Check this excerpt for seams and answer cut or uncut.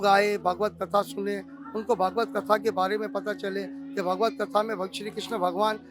uncut